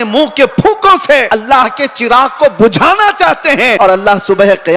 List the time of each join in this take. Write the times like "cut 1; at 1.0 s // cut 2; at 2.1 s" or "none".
cut 1; at 1.3 s // cut 2; at 3.7 s